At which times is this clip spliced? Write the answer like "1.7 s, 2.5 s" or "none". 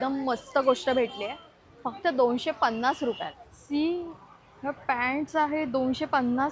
none